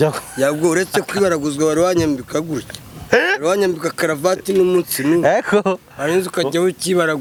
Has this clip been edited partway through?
no; 0 cuts

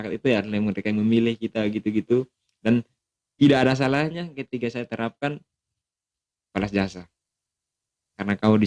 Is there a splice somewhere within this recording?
no; 0 cuts

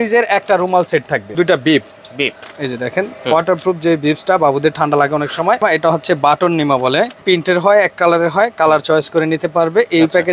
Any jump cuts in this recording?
yes; 3 cuts; at 1.3 s, 5.6 s, 7.2 s

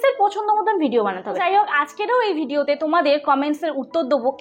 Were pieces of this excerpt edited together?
yes; 1 cut; at 1.4 s

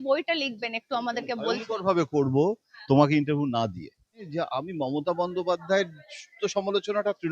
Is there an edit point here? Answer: yes; 1 cut; at 4.2 s

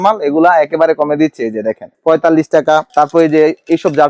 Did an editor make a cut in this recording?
no; 0 cuts

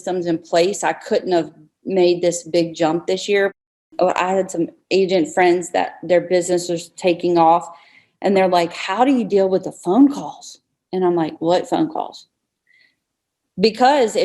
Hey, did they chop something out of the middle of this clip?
yes; 1 cut; at 3.6 s

